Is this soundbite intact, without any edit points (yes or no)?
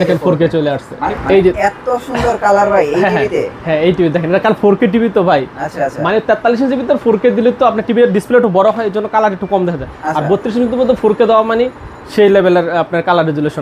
no